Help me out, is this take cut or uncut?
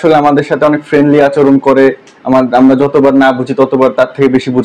uncut